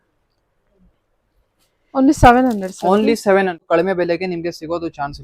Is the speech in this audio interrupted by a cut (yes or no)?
yes